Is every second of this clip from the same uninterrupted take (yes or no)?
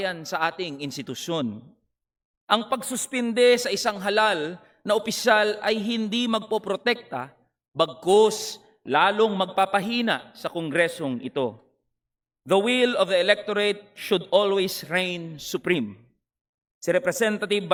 yes